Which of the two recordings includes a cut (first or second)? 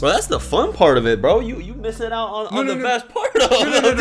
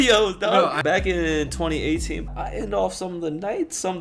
second